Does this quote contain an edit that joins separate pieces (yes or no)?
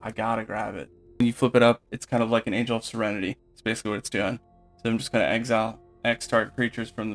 yes